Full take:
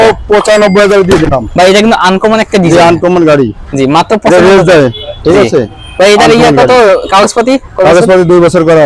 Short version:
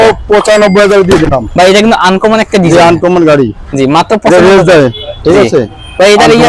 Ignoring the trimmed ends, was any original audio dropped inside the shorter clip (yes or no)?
no